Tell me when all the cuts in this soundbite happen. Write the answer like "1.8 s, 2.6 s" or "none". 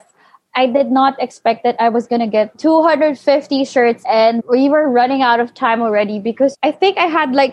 2.5 s, 4.1 s, 6.5 s